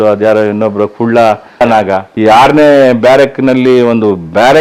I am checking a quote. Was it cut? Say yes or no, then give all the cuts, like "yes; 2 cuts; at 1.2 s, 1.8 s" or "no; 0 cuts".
no; 0 cuts